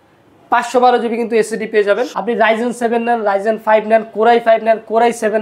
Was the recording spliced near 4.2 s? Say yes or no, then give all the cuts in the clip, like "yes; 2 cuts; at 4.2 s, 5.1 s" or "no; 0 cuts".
no; 1 cut; at 2.1 s